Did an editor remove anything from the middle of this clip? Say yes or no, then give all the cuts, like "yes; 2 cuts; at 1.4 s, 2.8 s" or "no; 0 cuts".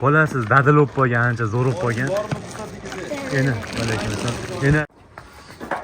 yes; 1 cut; at 4.8 s